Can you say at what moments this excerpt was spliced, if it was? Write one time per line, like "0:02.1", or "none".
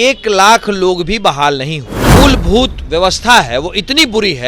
0:02.0